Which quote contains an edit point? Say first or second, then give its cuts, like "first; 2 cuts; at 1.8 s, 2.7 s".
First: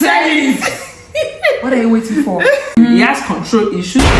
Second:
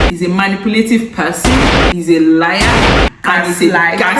first; 1 cut; at 2.8 s